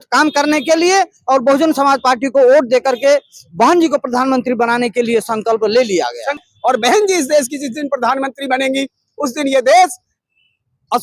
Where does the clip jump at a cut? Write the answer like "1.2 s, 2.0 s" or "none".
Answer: 6.4 s